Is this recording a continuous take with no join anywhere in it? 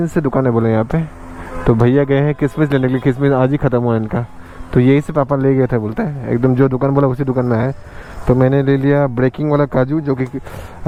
yes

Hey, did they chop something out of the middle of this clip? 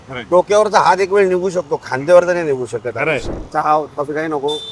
yes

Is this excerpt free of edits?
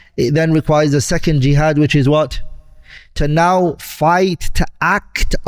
yes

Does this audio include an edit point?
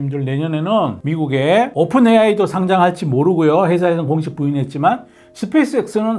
no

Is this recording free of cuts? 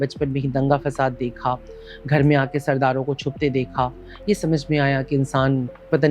yes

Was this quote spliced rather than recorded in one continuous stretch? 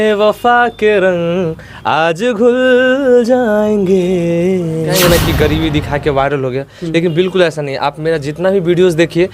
yes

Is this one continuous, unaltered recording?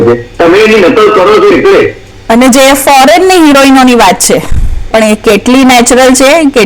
no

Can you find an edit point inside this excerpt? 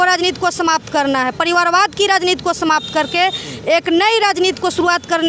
no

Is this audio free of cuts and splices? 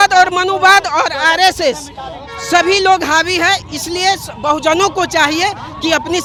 yes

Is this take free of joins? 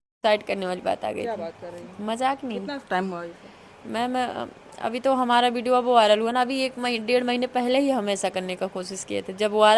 yes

